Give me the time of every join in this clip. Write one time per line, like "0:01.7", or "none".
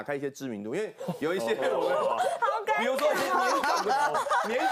none